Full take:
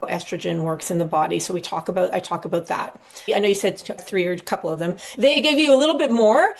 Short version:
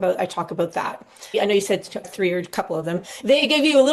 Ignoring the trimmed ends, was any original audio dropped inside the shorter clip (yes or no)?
no